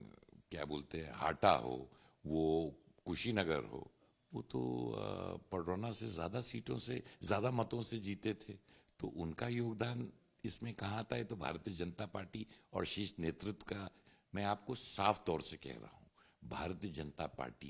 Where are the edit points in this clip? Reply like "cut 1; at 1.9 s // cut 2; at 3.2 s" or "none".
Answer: cut 1; at 14.0 s